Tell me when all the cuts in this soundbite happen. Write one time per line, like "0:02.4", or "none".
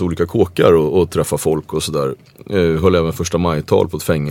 none